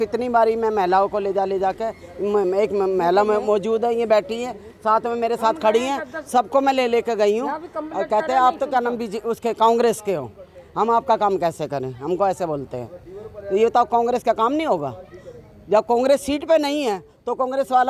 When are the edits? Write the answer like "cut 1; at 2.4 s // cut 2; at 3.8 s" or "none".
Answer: none